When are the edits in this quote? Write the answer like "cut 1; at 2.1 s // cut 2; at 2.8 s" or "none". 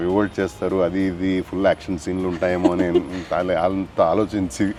none

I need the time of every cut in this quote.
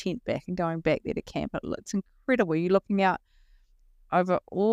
none

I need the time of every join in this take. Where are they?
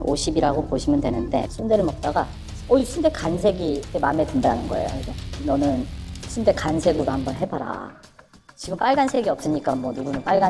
none

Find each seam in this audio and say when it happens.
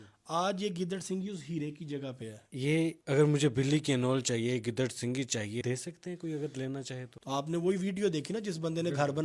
cut 1; at 2.6 s // cut 2; at 5.6 s // cut 3; at 7.1 s

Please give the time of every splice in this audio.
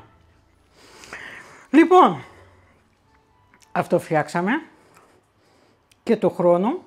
none

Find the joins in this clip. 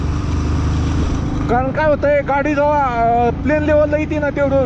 none

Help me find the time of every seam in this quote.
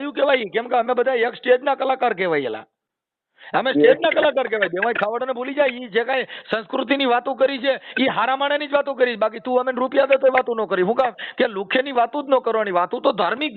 none

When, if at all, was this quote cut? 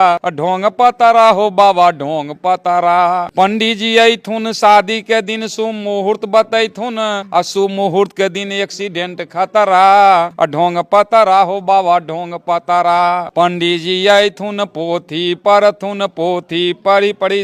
cut 1; at 3.3 s // cut 2; at 7.2 s // cut 3; at 13.3 s

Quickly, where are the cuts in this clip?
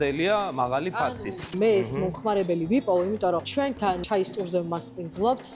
cut 1; at 1.5 s // cut 2; at 4.0 s

